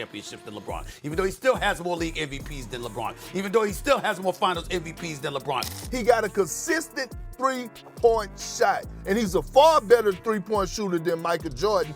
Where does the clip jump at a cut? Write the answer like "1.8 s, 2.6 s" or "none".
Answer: 5.7 s